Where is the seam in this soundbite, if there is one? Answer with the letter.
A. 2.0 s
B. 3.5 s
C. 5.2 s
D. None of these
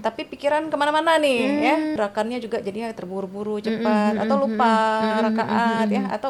A